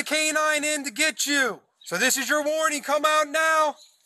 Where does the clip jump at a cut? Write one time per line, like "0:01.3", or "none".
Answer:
0:01.7